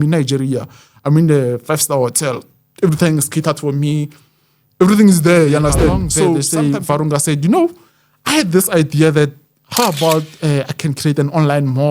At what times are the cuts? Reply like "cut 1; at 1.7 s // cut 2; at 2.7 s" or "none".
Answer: cut 1; at 6.4 s